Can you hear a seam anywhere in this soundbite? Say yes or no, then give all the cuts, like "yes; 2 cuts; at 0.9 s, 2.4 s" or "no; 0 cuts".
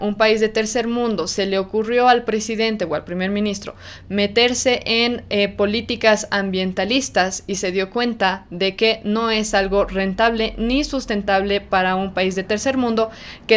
no; 0 cuts